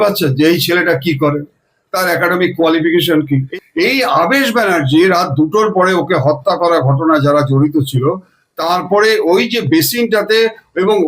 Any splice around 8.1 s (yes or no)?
no